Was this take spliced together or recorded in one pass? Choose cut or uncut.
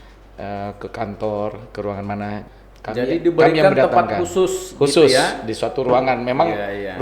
cut